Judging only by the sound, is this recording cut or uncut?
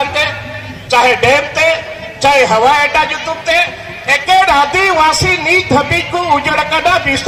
uncut